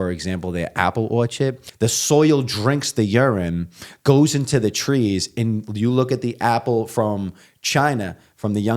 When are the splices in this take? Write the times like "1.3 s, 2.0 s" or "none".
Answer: 1.6 s